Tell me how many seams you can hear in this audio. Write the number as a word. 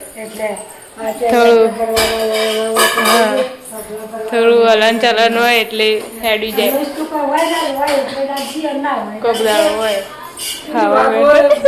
one